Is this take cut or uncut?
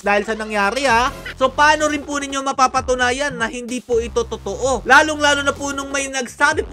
cut